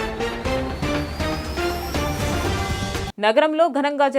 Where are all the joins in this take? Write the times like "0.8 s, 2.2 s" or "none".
3.1 s